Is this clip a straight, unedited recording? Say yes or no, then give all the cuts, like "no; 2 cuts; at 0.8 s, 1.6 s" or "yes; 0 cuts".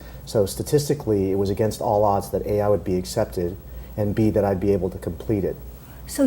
yes; 0 cuts